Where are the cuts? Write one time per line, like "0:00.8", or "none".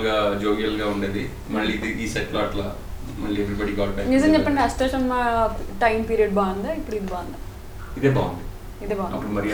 none